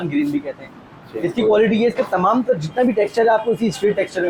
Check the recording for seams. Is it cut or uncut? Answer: uncut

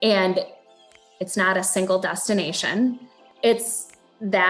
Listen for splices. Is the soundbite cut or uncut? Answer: cut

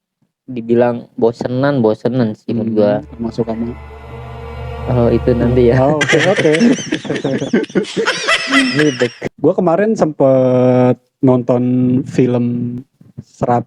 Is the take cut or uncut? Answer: cut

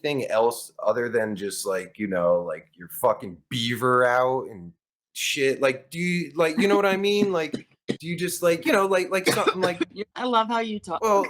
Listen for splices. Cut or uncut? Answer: cut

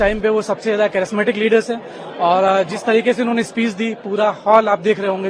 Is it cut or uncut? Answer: uncut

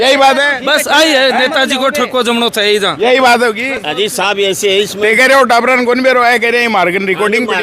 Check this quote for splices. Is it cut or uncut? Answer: uncut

